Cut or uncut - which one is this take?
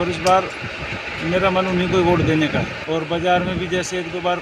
cut